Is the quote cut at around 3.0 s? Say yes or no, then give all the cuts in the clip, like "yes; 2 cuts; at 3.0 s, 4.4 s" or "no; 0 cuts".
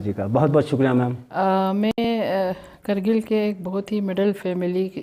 no; 1 cut; at 1.2 s